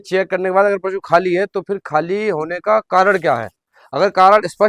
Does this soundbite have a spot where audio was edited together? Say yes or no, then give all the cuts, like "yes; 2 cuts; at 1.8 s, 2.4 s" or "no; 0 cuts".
no; 0 cuts